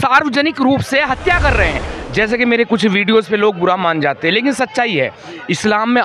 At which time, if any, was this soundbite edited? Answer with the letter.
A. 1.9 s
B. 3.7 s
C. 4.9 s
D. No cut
A